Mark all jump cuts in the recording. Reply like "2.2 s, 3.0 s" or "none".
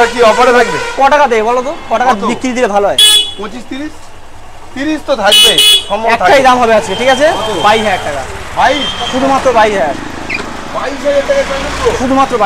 none

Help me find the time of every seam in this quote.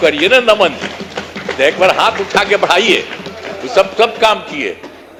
none

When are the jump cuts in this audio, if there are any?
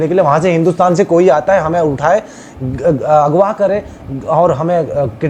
none

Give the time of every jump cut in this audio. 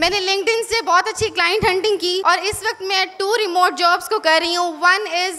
2.2 s

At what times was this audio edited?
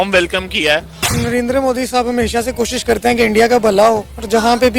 1.0 s

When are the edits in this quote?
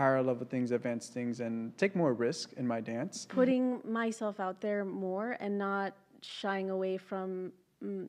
3.2 s

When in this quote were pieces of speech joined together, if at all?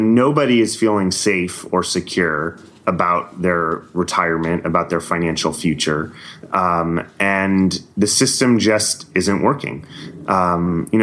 none

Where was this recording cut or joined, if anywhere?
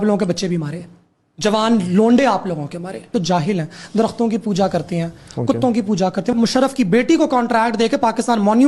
3.1 s, 6.3 s

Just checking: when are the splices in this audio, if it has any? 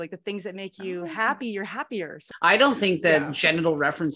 2.2 s

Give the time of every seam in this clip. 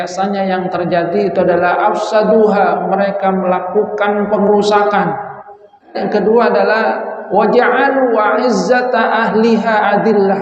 6.0 s

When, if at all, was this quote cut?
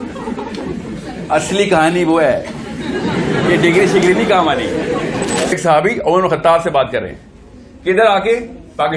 5.5 s

